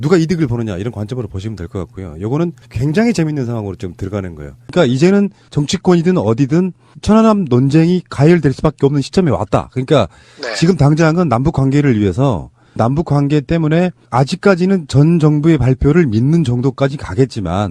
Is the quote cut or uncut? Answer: uncut